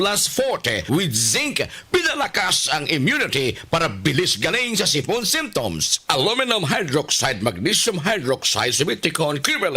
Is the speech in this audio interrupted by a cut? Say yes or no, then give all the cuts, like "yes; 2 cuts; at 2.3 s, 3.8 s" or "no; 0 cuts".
yes; 1 cut; at 6.0 s